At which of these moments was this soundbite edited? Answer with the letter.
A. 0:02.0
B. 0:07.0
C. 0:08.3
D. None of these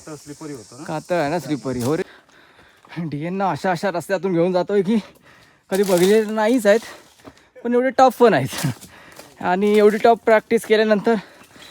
A